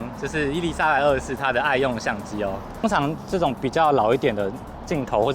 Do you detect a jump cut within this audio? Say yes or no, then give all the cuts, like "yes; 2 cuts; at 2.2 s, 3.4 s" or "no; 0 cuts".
yes; 1 cut; at 2.8 s